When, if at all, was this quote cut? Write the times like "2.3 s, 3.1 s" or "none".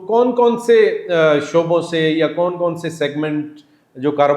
none

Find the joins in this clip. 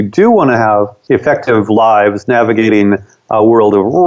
1.0 s

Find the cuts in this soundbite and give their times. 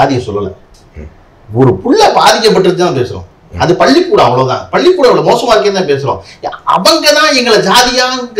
none

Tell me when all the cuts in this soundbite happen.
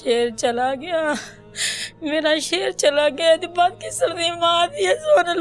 1.6 s

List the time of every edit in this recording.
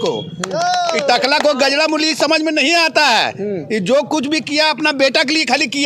none

